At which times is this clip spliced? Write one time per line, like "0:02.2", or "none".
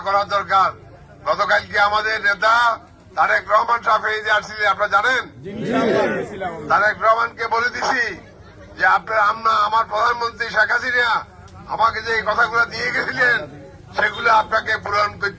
none